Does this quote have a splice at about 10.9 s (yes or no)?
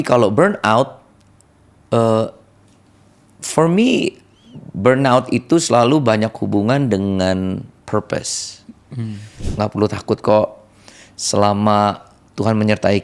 no